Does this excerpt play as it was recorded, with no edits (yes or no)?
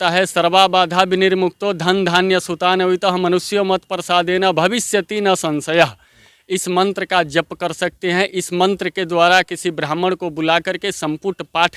yes